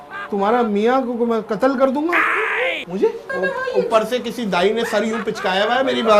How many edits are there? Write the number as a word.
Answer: one